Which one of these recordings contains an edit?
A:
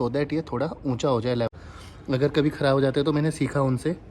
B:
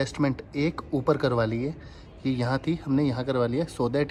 A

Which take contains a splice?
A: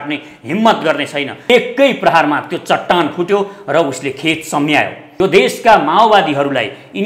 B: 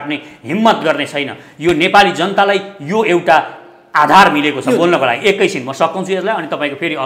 A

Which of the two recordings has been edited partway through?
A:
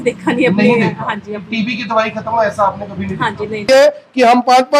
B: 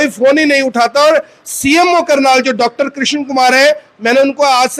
A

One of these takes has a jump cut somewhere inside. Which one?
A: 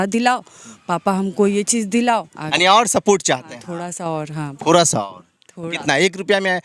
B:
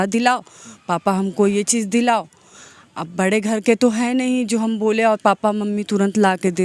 A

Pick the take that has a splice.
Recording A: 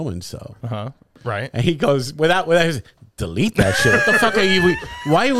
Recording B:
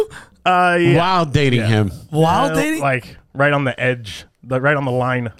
A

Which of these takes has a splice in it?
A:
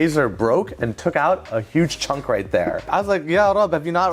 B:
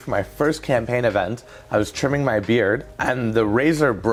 A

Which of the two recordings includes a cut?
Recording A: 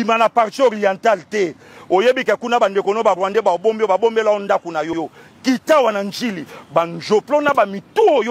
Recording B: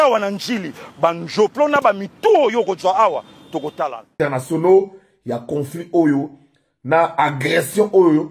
B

